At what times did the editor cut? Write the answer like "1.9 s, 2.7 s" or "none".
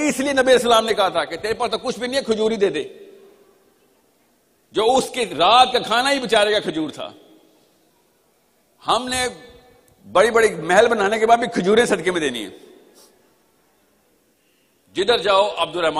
13.4 s